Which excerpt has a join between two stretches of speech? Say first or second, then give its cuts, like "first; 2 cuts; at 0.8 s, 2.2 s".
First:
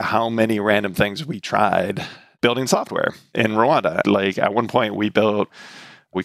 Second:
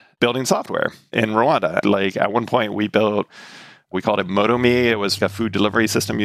second; 1 cut; at 5.1 s